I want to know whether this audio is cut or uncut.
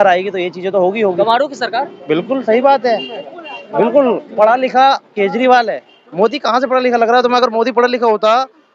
uncut